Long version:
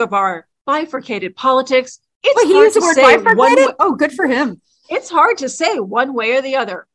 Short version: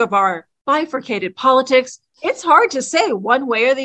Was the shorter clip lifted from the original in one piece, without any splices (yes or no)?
no